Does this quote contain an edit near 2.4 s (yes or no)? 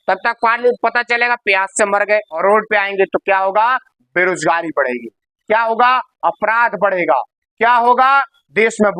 yes